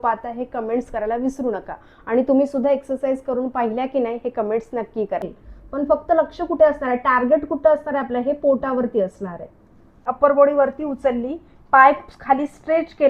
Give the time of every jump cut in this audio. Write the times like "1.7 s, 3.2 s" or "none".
5.3 s, 10.1 s